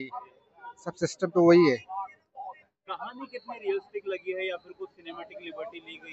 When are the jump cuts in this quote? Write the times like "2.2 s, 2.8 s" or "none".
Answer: none